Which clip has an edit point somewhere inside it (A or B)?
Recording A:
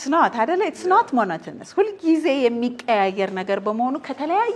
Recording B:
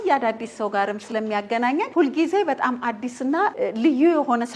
B